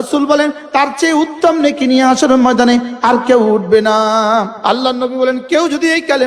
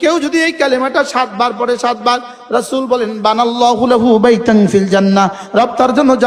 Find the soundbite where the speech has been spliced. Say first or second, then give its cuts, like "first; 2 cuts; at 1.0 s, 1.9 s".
first; 1 cut; at 4.5 s